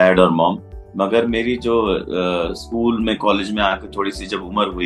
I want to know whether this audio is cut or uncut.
uncut